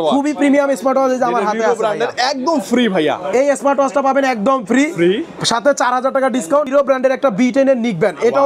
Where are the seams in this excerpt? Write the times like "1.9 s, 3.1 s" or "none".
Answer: 6.7 s